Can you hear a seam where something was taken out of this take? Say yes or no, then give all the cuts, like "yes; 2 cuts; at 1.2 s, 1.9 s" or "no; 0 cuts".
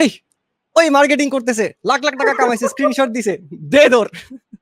no; 0 cuts